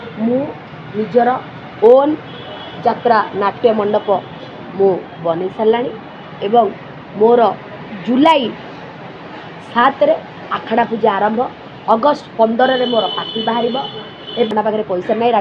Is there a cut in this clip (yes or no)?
yes